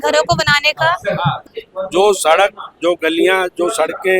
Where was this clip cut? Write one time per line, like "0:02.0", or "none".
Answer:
0:01.4

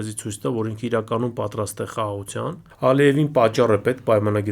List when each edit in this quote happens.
0:02.7

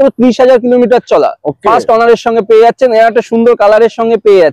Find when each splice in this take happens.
none

